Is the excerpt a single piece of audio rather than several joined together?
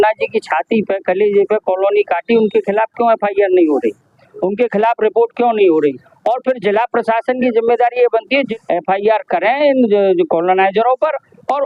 no; 1 cut; at 8.5 s

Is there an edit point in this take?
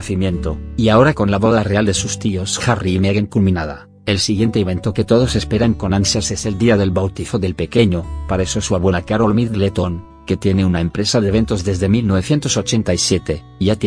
yes; 1 cut; at 2.2 s

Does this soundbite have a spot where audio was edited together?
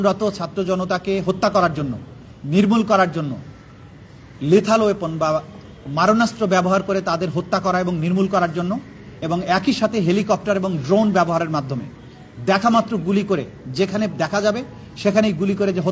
no; 0 cuts

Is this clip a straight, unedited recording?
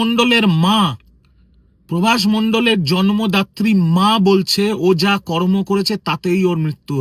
yes; 0 cuts

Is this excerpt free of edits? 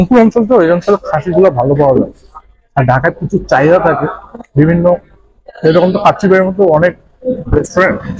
yes; 0 cuts

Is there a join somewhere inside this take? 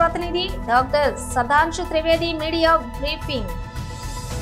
yes; 1 cut; at 3.5 s

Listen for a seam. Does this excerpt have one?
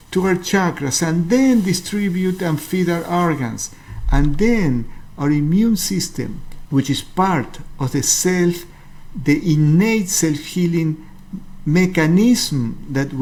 no; 0 cuts

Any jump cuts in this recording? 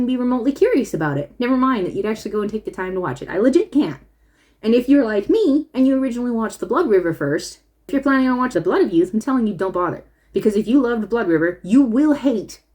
yes; 2 cuts; at 7.9 s, 8.5 s

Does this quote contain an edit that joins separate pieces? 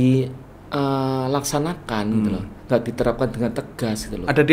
no; 0 cuts

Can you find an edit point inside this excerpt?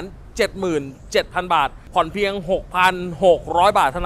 yes; 1 cut; at 1.8 s

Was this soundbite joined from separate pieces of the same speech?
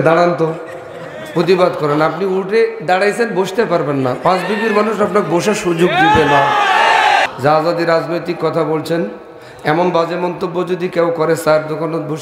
yes; 1 cut; at 7.2 s

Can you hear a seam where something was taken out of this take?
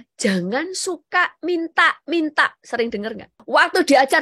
yes; 1 cut; at 3.3 s

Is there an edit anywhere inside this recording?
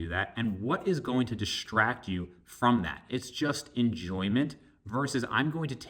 yes; 1 cut; at 3.1 s

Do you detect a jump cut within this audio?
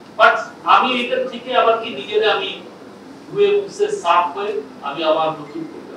no; 0 cuts

